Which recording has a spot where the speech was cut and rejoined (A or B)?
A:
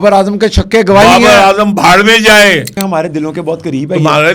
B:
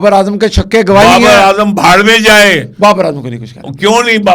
A